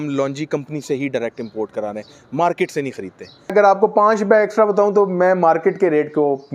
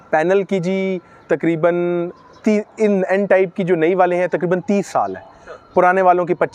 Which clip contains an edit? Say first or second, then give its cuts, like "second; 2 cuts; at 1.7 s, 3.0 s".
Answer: first; 1 cut; at 3.5 s